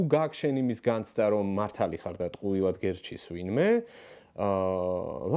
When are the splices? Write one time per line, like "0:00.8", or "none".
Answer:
none